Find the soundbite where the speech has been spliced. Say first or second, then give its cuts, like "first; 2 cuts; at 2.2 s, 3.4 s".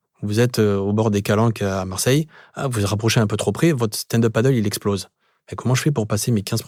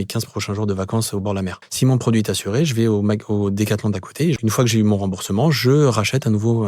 second; 2 cuts; at 1.6 s, 4.4 s